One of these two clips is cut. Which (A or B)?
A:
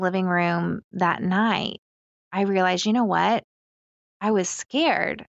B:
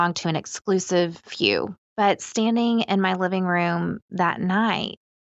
B